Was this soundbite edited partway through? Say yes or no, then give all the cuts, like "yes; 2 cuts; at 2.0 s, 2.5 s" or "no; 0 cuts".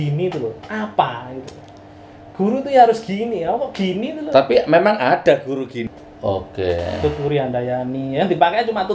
yes; 1 cut; at 5.8 s